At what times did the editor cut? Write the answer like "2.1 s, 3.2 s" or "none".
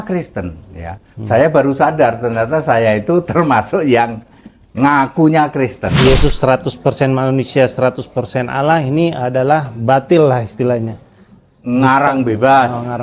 5.9 s